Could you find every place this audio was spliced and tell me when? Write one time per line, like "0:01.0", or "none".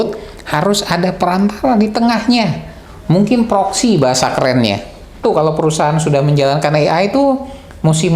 0:05.2